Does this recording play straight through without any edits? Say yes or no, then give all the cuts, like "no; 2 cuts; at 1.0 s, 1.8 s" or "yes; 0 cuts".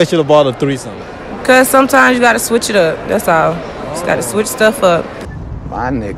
no; 1 cut; at 5.2 s